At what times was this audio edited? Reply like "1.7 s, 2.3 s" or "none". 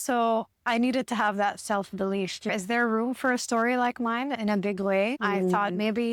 2.5 s, 4.4 s, 5.2 s